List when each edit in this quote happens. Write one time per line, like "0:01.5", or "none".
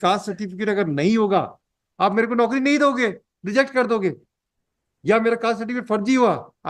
none